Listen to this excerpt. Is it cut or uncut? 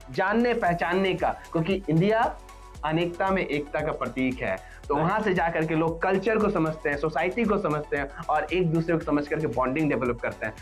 uncut